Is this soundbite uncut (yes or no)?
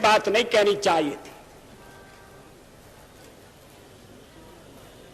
yes